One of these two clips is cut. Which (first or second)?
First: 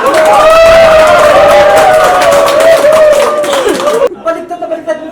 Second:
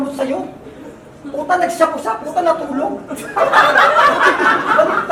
first